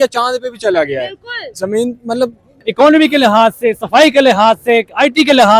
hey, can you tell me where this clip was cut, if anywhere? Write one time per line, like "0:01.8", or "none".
0:02.6